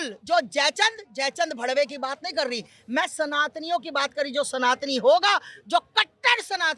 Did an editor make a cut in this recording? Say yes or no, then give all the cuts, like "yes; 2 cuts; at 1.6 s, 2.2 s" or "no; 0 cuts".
no; 0 cuts